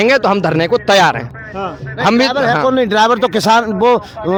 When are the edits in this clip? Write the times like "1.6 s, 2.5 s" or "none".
none